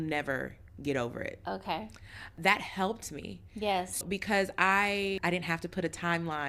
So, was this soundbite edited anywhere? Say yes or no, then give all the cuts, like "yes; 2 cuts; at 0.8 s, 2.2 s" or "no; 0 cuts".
yes; 3 cuts; at 2.3 s, 4.0 s, 5.2 s